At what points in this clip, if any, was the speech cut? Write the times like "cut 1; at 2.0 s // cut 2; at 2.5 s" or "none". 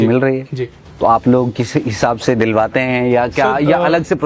none